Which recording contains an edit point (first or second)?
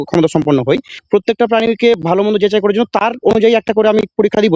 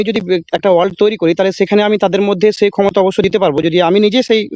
first